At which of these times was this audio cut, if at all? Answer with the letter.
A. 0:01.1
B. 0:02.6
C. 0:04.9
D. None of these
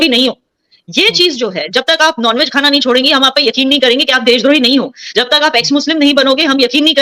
D